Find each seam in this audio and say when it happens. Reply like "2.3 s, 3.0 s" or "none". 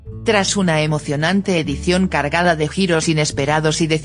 none